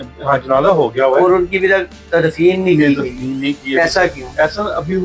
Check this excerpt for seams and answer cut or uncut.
uncut